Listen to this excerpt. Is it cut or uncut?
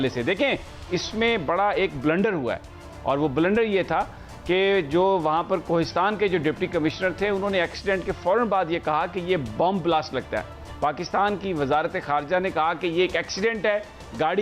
uncut